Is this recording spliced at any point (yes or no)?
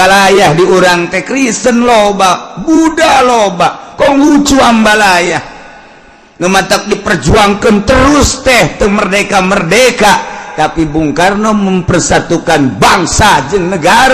no